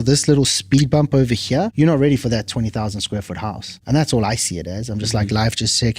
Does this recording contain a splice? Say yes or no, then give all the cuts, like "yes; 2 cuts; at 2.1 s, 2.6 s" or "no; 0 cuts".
yes; 2 cuts; at 1.7 s, 3.7 s